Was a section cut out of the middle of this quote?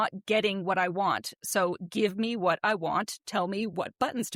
no; 0 cuts

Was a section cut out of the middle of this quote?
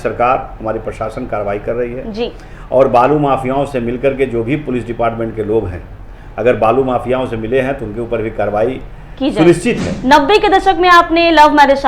yes; 1 cut; at 9.9 s

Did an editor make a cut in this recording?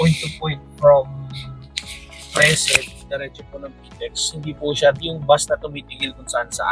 no; 0 cuts

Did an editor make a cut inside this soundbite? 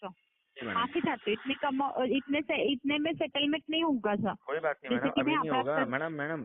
no; 0 cuts

